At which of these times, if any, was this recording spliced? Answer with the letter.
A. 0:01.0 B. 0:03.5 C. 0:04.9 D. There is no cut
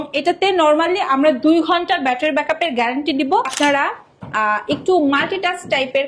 B